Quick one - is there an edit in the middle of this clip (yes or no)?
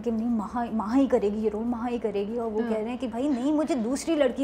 no